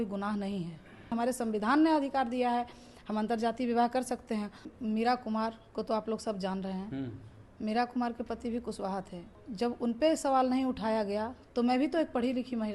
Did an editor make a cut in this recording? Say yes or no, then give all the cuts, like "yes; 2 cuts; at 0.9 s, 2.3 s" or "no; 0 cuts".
yes; 4 cuts; at 1.1 s, 4.6 s, 9.4 s, 11.4 s